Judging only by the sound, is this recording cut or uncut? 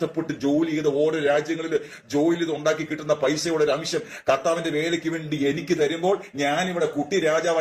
uncut